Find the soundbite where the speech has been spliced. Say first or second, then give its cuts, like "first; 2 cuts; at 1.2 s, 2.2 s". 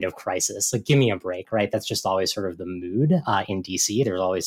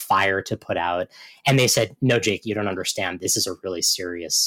second; 1 cut; at 3.2 s